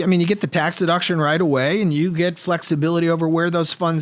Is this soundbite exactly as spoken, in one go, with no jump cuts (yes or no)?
yes